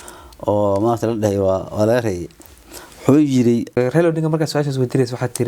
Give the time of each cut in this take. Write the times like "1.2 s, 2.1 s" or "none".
3.7 s